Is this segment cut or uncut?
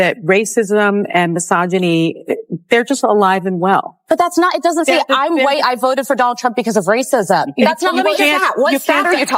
cut